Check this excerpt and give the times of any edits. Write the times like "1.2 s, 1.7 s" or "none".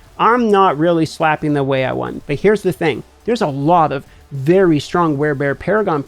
2.1 s, 3.1 s